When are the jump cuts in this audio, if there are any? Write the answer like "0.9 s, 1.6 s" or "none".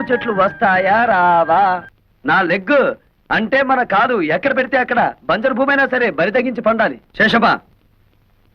1.9 s, 7.0 s